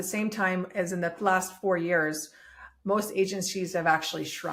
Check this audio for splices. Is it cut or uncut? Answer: uncut